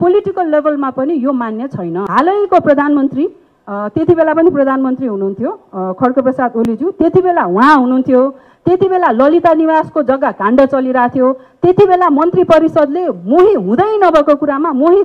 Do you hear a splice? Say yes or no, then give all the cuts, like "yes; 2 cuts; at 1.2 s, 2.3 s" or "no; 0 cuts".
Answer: yes; 1 cut; at 2.0 s